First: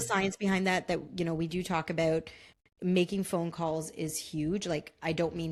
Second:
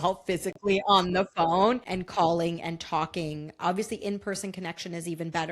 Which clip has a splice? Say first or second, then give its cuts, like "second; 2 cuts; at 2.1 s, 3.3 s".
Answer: second; 1 cut; at 2.0 s